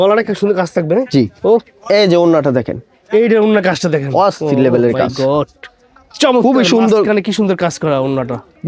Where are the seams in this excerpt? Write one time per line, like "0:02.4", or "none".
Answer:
none